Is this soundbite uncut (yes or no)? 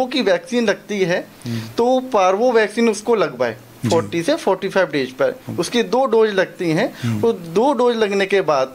yes